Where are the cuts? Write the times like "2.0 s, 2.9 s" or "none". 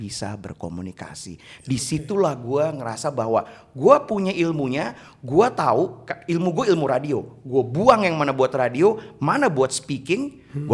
none